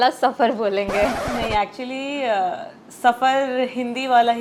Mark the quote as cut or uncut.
uncut